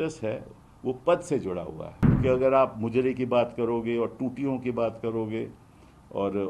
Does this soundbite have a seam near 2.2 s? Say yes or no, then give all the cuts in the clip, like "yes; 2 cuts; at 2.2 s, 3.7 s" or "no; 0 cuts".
yes; 1 cut; at 2.2 s